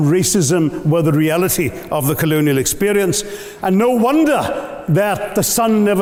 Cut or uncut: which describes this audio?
uncut